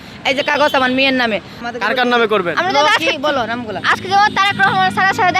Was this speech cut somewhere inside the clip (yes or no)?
yes